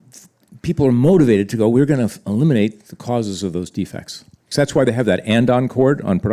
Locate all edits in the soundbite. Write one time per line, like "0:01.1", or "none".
0:04.4